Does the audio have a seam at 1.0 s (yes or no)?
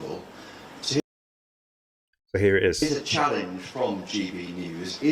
no